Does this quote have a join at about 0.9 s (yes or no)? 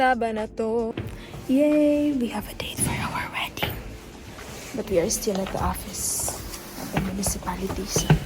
yes